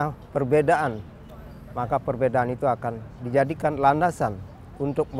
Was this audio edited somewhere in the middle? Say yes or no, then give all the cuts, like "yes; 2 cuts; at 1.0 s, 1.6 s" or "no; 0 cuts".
no; 0 cuts